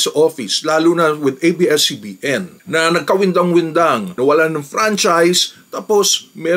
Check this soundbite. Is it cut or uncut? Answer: uncut